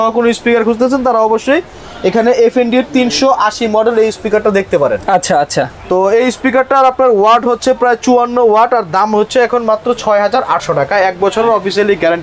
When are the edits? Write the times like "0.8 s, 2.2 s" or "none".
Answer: none